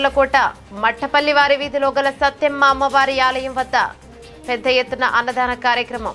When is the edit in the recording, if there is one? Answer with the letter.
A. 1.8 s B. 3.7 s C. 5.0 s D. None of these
D